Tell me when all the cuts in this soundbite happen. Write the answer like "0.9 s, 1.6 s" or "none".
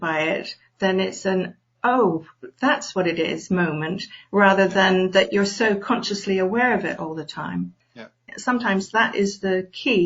8.3 s